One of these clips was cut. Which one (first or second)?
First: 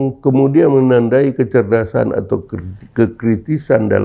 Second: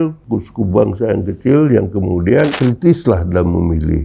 second